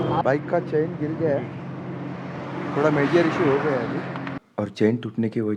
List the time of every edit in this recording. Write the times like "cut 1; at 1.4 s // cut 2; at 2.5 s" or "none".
cut 1; at 4.3 s